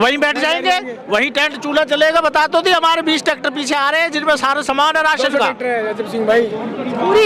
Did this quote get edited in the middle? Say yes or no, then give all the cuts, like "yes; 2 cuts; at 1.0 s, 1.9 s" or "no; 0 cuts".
no; 0 cuts